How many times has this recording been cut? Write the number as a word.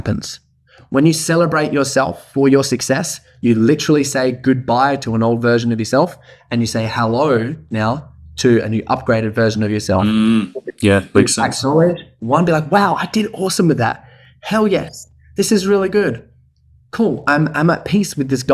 zero